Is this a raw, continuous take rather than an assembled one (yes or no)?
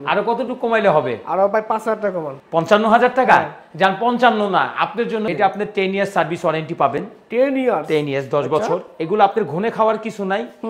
no